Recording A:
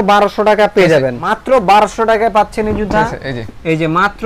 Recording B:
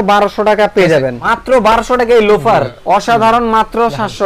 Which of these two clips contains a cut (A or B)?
B